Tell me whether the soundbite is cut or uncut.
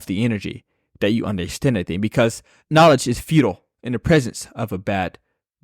cut